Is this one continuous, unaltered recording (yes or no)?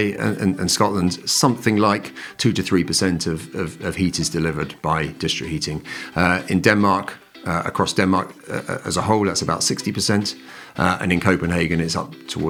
yes